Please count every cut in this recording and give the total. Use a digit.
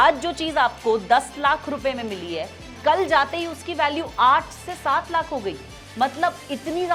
0